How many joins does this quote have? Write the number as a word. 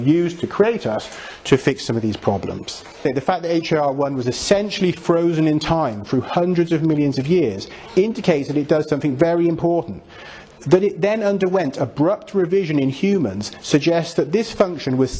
one